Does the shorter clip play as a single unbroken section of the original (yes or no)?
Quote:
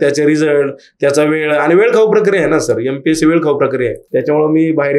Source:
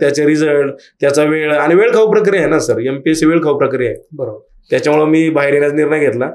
no